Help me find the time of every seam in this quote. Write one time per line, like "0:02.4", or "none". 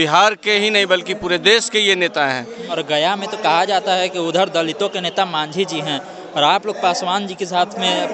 0:02.8